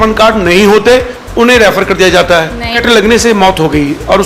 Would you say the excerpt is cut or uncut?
cut